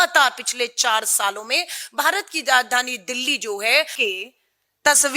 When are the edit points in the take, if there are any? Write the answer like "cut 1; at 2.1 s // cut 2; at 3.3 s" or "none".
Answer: cut 1; at 4.0 s